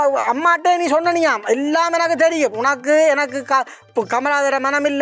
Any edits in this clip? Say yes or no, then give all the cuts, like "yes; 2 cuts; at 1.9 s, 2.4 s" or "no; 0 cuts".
no; 0 cuts